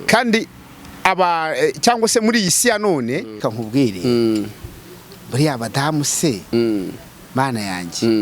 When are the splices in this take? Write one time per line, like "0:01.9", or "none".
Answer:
0:03.4